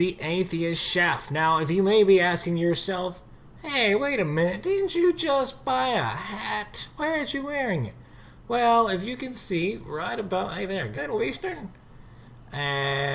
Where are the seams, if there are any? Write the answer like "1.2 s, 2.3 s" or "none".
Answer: none